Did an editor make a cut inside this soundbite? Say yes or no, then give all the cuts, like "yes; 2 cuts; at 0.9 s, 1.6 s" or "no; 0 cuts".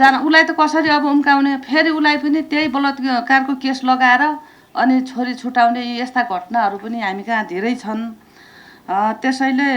no; 0 cuts